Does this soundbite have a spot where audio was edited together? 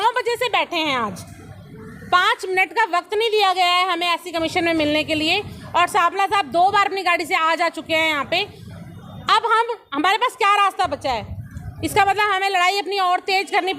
no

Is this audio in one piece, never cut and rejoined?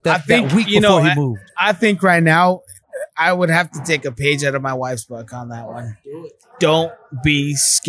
no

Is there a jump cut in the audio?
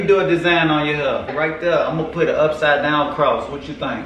yes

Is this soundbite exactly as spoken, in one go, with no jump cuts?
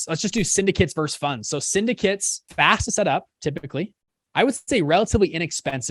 no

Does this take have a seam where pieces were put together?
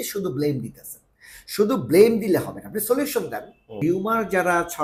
yes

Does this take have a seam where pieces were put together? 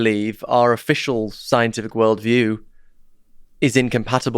no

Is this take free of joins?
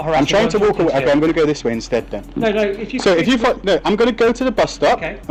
yes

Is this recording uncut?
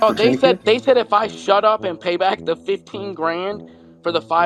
yes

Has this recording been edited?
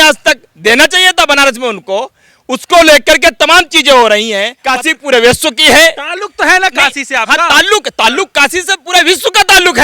yes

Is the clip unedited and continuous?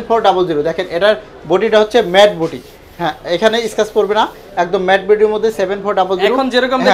yes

